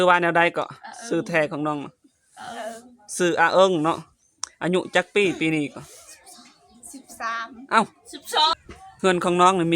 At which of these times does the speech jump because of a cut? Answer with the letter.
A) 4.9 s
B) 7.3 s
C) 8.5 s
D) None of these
C